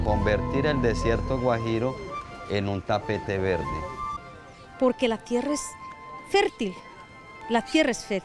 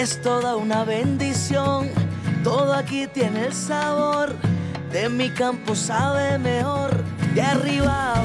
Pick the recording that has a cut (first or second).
first